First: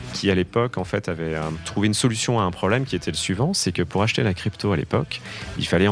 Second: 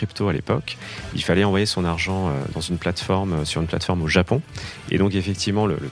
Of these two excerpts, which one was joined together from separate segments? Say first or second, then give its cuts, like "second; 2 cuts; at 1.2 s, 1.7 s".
first; 1 cut; at 1.6 s